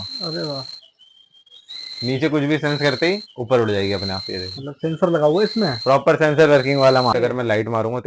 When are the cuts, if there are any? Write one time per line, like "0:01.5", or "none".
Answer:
0:07.1

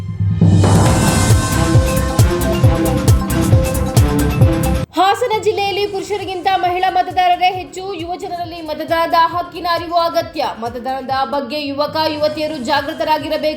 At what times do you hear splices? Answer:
0:04.8

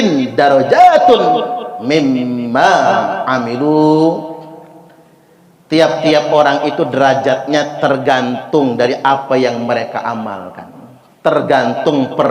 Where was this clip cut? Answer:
none

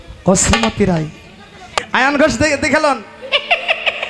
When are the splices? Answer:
0:01.7

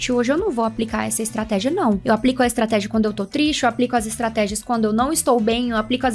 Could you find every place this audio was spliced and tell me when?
0:02.0

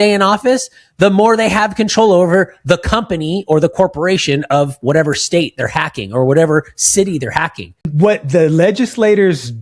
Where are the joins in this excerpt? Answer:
0:07.8

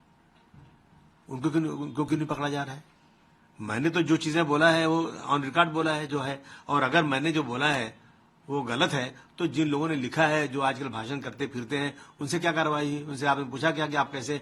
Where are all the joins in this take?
none

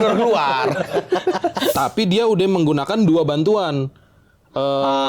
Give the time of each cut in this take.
0:01.8

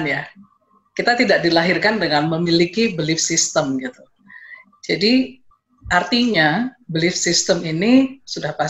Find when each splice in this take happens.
none

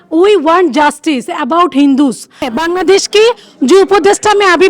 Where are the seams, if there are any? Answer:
0:02.5

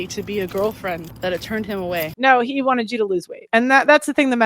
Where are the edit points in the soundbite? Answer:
0:01.1
0:02.1

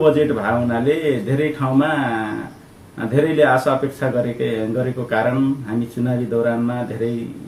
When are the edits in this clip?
none

